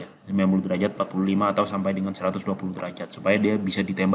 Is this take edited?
no; 0 cuts

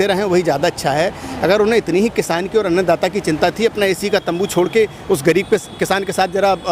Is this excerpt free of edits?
yes; 0 cuts

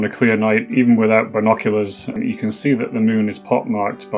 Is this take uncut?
no; 1 cut; at 2.1 s

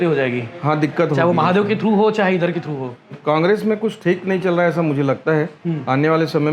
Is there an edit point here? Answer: yes; 1 cut; at 3.1 s

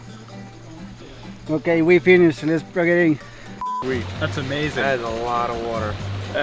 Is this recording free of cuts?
no; 1 cut; at 3.7 s

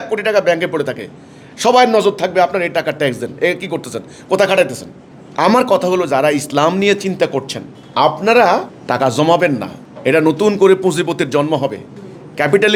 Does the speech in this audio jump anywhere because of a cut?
no; 0 cuts

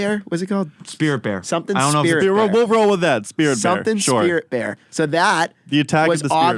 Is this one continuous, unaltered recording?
yes; 0 cuts

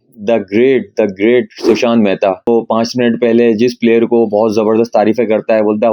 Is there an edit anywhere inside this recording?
yes; 1 cut; at 2.5 s

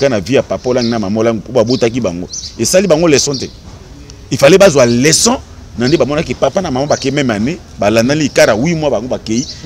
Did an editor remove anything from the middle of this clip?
no; 0 cuts

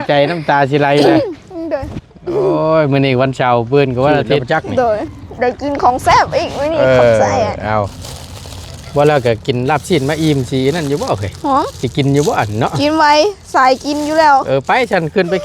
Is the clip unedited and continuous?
no; 1 cut; at 5.1 s

